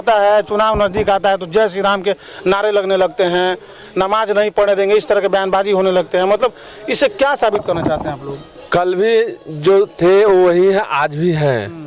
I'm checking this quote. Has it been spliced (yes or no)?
no